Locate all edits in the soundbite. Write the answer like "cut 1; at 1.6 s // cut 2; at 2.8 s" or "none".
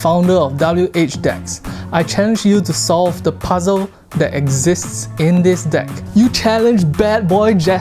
cut 1; at 5.9 s